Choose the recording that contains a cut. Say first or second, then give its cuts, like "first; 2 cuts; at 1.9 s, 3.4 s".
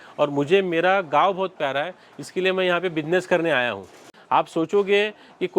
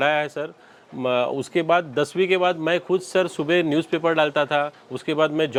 first; 1 cut; at 4.1 s